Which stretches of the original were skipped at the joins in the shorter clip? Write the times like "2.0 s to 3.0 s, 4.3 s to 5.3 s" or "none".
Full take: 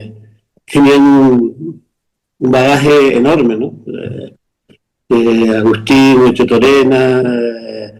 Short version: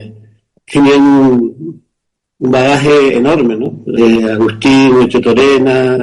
4.0 s to 5.2 s